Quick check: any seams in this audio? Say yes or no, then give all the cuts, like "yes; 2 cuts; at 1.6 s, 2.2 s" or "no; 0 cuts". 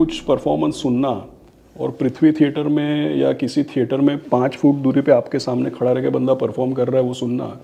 no; 0 cuts